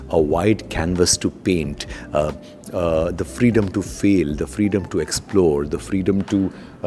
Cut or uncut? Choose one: uncut